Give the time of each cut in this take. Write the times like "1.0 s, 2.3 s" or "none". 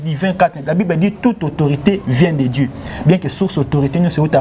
none